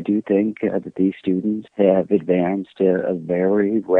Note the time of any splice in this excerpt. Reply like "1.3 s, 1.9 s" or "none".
1.6 s